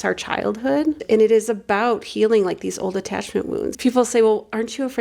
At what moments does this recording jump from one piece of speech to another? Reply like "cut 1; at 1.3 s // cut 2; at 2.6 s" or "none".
cut 1; at 1.0 s // cut 2; at 3.7 s